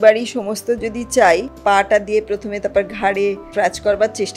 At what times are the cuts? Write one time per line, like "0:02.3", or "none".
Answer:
0:01.5
0:03.5